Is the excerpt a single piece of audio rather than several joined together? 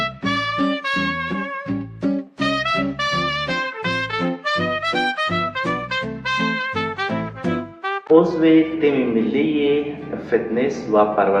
yes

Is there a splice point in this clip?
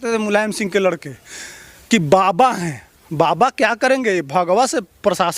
no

